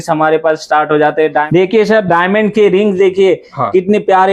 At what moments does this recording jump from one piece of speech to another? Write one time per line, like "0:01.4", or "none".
0:01.5